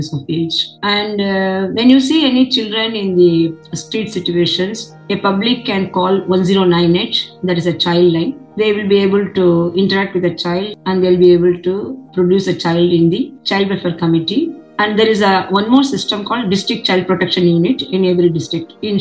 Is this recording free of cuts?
no; 2 cuts; at 8.4 s, 14.6 s

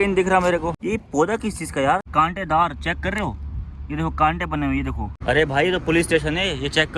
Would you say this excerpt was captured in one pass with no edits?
no; 3 cuts; at 0.8 s, 2.1 s, 5.2 s

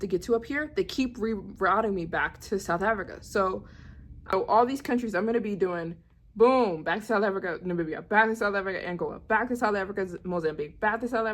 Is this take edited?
yes; 1 cut; at 4.3 s

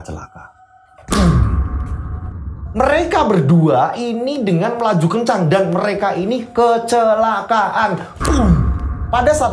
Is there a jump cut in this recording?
yes; 1 cut; at 2.5 s

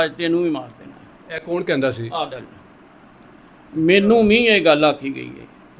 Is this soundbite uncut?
yes; 0 cuts

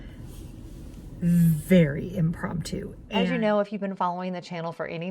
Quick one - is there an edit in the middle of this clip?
yes; 1 cut; at 3.0 s

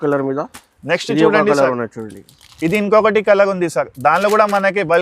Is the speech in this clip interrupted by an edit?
no; 0 cuts

